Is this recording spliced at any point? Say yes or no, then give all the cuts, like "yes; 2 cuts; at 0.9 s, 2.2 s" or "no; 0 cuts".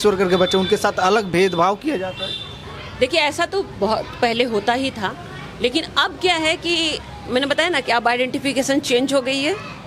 no; 0 cuts